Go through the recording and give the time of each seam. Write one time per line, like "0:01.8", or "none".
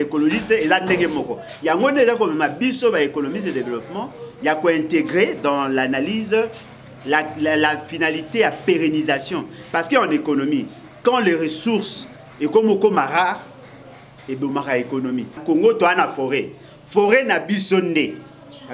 0:15.4